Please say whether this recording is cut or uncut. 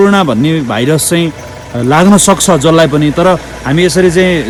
uncut